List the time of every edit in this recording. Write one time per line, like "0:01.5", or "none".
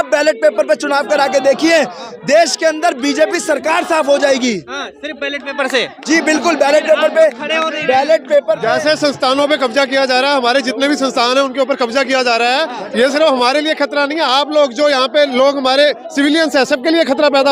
none